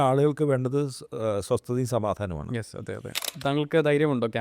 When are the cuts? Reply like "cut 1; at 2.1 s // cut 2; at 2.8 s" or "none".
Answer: cut 1; at 3.2 s